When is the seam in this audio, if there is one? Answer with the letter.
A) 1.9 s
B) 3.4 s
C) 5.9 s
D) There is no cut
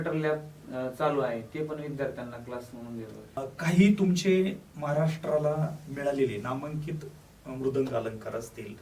B